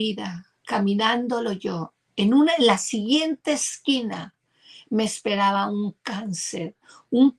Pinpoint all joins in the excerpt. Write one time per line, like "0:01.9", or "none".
none